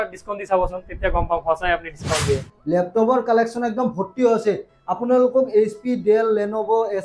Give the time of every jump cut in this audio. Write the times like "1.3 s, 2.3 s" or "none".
2.5 s